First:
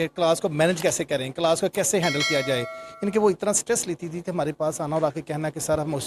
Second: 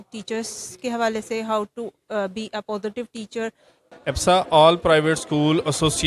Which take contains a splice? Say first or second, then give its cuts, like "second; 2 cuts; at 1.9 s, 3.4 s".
second; 1 cut; at 3.9 s